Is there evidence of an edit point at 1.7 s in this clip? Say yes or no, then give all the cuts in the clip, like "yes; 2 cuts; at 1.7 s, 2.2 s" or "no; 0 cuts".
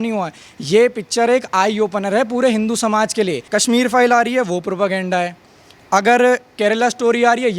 no; 1 cut; at 3.4 s